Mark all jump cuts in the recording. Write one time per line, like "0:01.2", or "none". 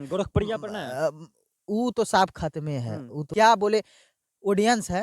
0:03.4